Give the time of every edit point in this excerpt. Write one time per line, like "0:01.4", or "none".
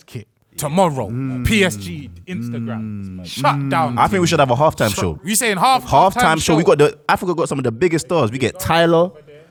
none